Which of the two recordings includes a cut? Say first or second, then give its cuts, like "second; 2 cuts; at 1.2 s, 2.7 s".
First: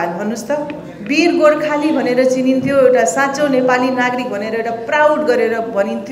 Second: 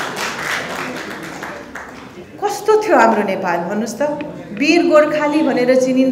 second; 1 cut; at 2.3 s